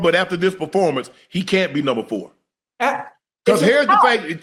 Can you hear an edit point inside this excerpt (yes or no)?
no